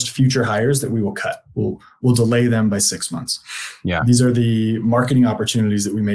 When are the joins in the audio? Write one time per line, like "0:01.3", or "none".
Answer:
none